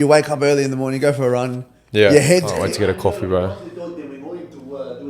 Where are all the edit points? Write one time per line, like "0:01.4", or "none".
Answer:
0:02.5